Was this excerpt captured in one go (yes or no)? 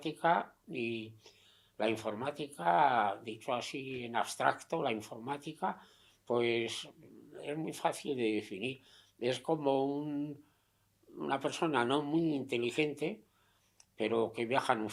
yes